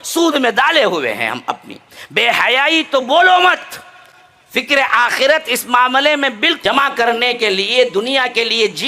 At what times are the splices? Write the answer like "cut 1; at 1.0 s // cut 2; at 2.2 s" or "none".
cut 1; at 6.6 s

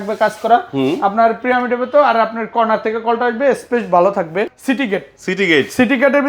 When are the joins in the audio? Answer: cut 1; at 4.5 s

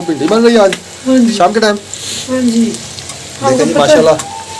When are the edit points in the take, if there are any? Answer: none

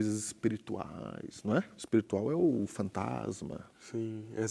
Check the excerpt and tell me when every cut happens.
cut 1; at 1.7 s

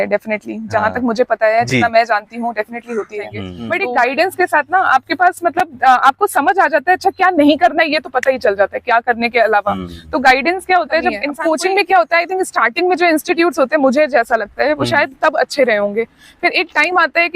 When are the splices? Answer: cut 1; at 3.5 s // cut 2; at 11.3 s

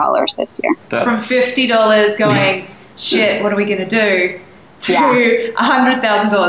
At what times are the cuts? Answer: none

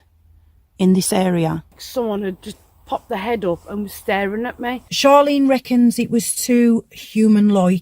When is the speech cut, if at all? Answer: cut 1; at 1.8 s // cut 2; at 4.8 s

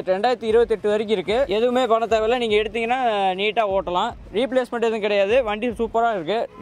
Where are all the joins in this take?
cut 1; at 1.5 s

